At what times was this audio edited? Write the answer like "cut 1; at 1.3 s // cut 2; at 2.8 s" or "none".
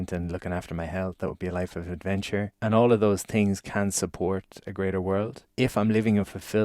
cut 1; at 2.5 s // cut 2; at 5.4 s